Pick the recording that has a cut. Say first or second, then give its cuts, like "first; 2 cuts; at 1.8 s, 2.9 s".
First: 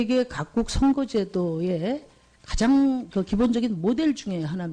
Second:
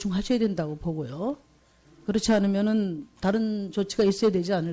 second; 1 cut; at 3.1 s